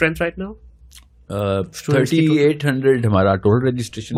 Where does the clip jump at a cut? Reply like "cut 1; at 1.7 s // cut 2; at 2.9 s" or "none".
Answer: none